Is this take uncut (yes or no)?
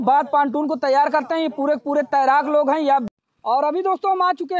no